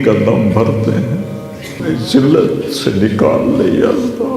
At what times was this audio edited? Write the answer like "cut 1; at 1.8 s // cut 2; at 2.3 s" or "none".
cut 1; at 1.8 s